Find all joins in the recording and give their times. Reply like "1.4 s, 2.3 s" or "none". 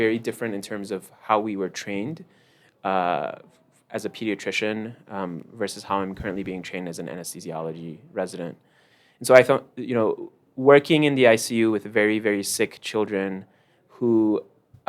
none